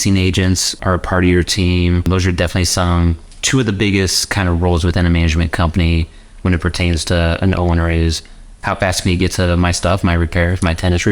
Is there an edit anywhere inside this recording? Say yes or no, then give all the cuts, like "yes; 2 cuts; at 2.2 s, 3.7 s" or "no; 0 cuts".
yes; 2 cuts; at 0.8 s, 2.1 s